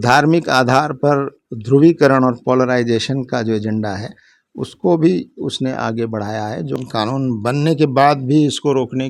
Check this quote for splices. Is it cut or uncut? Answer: cut